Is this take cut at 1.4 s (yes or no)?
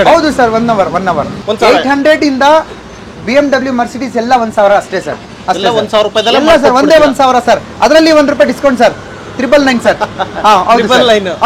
yes